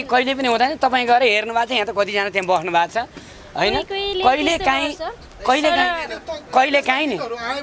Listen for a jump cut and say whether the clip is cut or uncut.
uncut